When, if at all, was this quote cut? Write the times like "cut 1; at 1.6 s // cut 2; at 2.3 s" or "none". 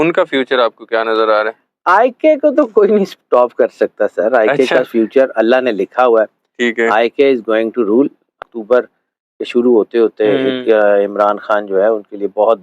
cut 1; at 8.4 s